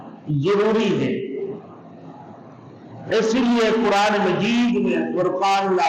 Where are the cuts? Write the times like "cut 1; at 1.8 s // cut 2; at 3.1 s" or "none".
none